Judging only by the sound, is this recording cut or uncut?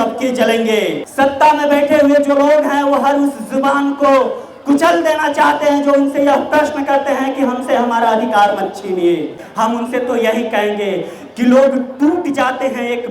cut